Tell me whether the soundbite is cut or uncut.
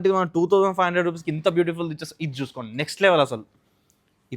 uncut